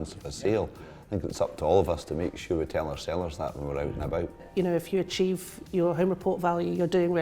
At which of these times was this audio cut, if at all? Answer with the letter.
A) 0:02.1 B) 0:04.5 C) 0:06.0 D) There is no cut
B